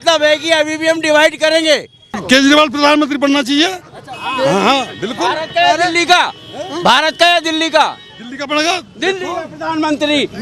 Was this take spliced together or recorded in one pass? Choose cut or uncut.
cut